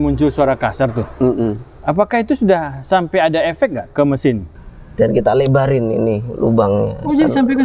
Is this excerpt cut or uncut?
cut